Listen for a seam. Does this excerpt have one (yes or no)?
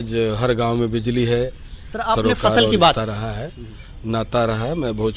yes